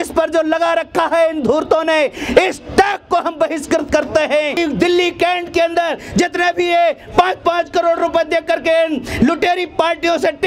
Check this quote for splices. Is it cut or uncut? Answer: cut